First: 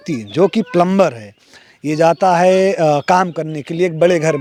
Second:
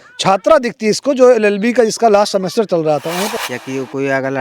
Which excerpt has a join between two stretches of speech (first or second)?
second